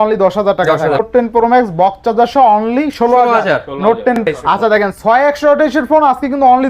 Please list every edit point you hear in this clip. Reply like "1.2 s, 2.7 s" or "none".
1.1 s, 4.2 s